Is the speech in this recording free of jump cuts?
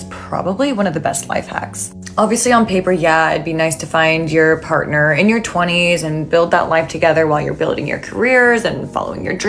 yes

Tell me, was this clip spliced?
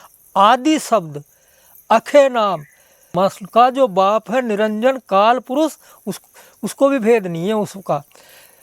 yes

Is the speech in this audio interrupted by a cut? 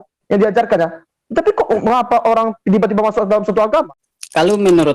yes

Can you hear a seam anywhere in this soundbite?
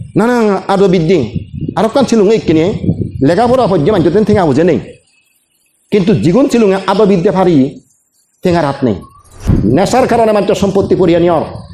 yes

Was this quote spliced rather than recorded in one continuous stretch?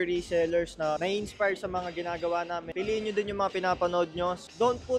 no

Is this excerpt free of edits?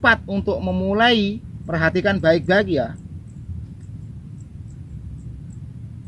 no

